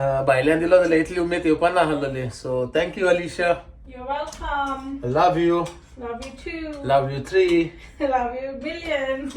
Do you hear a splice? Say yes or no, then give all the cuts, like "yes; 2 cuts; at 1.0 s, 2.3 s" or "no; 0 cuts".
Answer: no; 0 cuts